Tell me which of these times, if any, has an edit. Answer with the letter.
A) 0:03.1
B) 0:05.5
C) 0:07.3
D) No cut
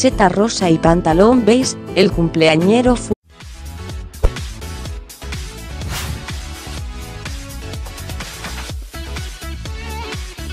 D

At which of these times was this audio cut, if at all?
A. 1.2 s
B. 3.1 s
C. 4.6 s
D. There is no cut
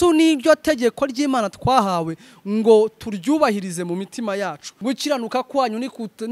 C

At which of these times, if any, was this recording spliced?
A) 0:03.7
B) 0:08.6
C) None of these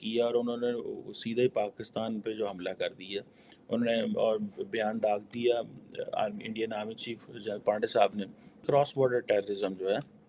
B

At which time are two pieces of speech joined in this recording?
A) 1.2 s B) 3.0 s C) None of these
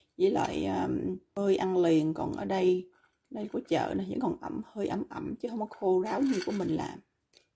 A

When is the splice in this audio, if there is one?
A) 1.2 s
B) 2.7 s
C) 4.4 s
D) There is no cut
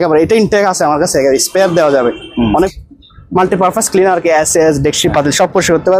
B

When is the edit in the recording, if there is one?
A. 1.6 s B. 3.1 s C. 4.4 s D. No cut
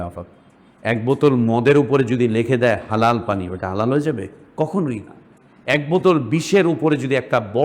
C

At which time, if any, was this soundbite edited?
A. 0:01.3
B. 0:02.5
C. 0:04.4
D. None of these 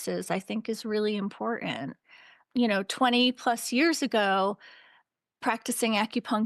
D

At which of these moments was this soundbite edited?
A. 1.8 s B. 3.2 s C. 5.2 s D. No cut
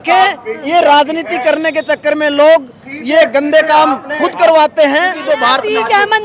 C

